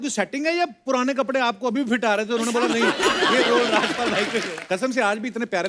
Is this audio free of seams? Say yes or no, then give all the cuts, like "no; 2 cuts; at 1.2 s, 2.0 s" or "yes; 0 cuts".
no; 1 cut; at 4.5 s